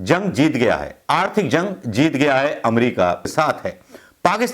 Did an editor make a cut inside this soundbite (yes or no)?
yes